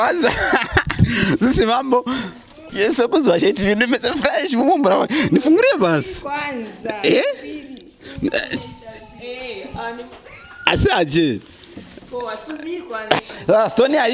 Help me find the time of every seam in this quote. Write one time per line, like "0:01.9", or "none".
0:02.6
0:13.2

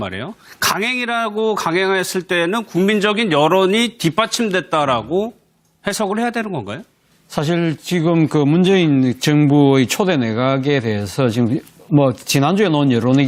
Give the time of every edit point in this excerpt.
none

